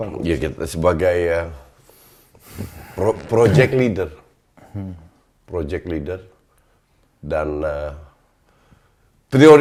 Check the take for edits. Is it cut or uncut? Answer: uncut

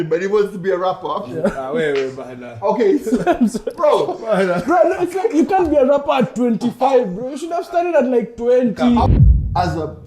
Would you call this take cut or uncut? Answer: cut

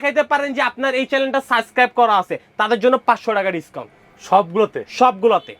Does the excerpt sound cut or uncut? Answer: uncut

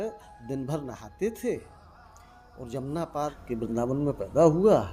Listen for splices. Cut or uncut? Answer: cut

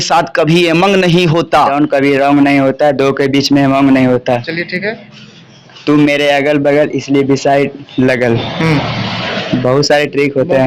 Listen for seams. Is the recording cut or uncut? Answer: cut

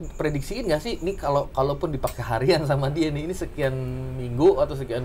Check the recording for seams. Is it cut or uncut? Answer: uncut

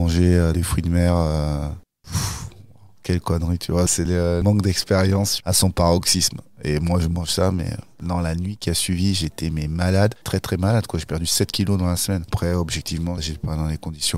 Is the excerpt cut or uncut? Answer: cut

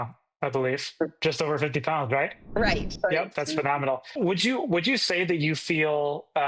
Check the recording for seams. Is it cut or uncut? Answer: uncut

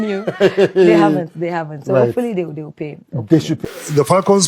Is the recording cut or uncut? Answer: cut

